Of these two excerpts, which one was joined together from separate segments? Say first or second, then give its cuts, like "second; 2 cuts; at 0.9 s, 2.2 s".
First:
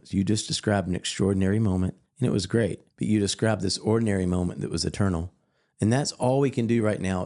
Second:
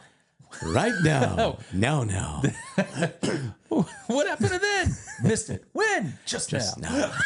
first; 2 cuts; at 2.0 s, 2.9 s